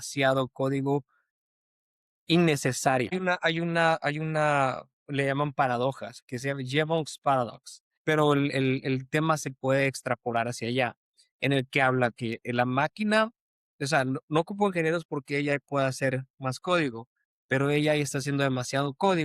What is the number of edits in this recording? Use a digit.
2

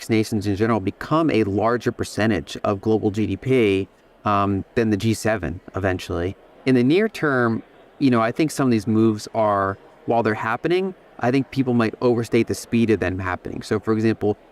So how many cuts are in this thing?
1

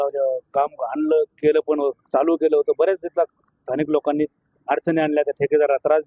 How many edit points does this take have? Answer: 0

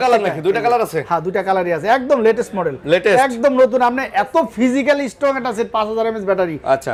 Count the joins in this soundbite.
0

